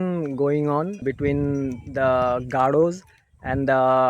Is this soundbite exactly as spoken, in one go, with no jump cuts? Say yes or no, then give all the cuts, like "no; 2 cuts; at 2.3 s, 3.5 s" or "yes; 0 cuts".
no; 1 cut; at 1.0 s